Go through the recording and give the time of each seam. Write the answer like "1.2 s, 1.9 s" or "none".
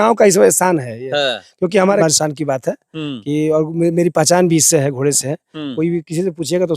2.0 s

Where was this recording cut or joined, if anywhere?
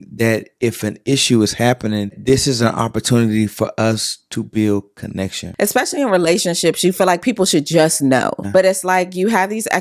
2.2 s, 5.4 s, 8.4 s

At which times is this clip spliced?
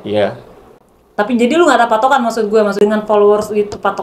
2.7 s

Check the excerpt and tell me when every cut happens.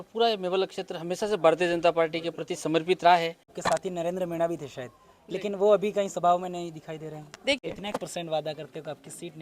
3.5 s, 7.6 s

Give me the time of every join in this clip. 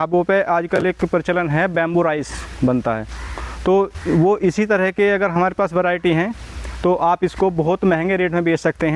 none

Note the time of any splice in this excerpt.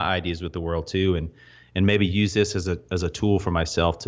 none

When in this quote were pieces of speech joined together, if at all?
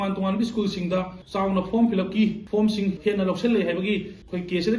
1.2 s, 2.8 s

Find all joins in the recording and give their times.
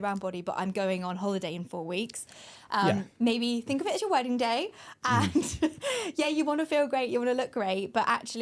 none

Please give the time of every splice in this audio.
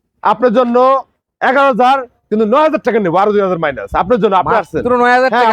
none

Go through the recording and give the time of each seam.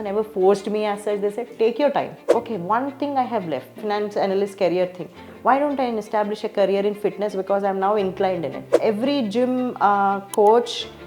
2.2 s, 3.8 s, 8.7 s

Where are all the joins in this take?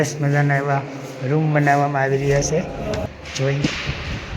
3.1 s

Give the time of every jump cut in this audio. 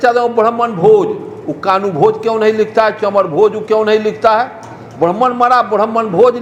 none

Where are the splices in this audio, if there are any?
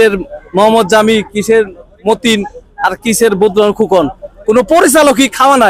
none

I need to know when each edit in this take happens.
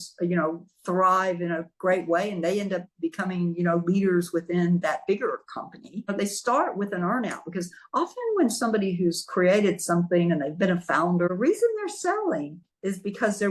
6.0 s, 11.3 s

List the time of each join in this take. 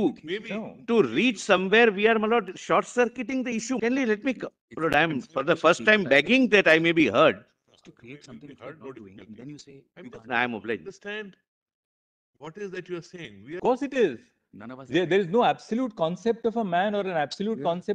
3.8 s, 13.6 s

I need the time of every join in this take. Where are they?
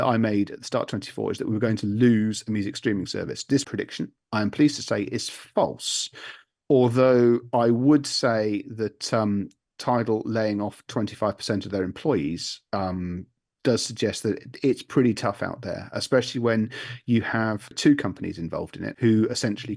3.7 s, 17.8 s, 18.8 s

